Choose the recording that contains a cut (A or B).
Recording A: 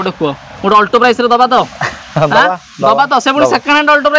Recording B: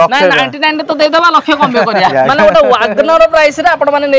B